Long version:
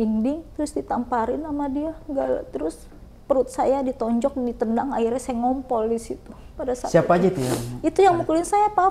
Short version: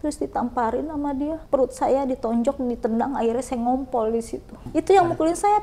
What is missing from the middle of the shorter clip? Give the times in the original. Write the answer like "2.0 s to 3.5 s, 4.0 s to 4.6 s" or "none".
2.0 s to 3.2 s, 6.4 s to 7.7 s